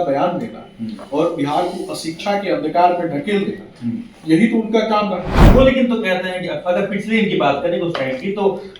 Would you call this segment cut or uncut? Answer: cut